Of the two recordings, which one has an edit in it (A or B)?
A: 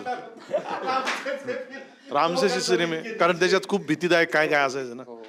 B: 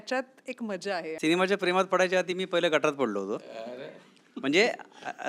B